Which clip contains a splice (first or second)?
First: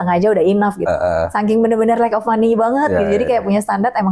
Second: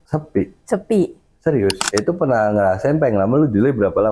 second